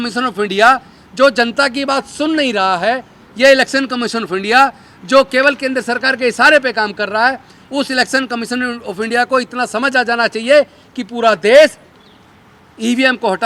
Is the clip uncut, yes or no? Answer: yes